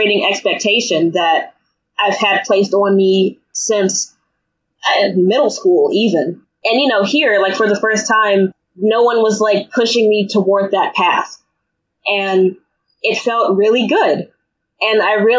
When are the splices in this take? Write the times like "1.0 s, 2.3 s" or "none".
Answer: 3.5 s, 6.4 s